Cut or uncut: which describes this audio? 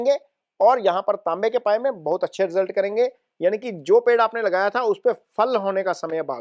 uncut